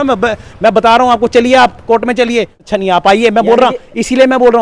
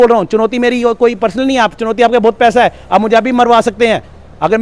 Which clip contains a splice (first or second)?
first